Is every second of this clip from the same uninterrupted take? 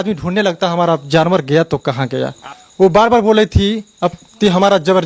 no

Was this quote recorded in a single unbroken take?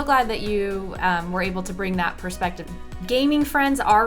no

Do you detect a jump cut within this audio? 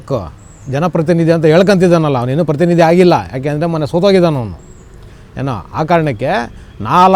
no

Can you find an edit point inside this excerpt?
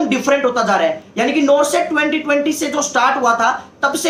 no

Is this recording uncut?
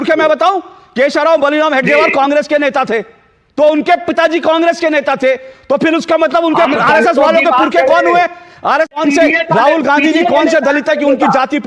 no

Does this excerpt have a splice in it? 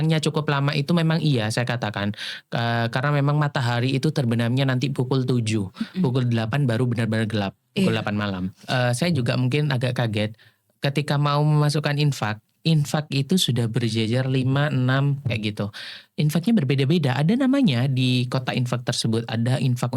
yes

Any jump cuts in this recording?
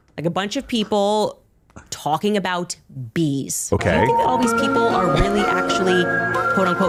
no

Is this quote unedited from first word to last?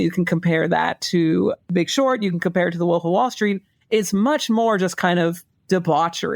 yes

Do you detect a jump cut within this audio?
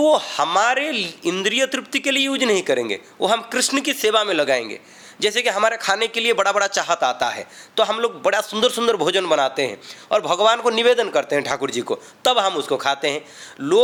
no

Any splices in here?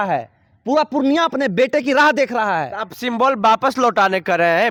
no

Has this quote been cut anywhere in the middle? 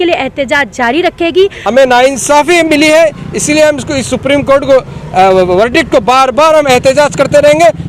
yes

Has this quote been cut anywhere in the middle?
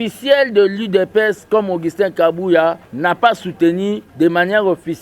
yes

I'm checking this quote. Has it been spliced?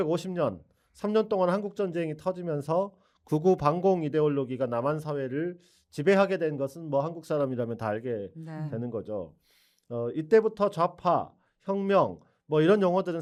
no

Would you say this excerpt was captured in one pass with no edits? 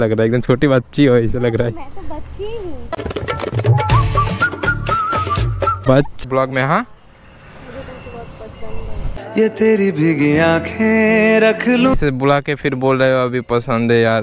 no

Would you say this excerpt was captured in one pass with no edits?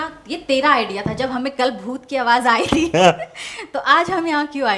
yes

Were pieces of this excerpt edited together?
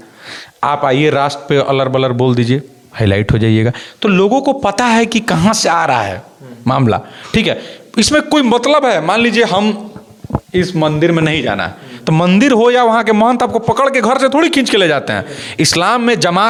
no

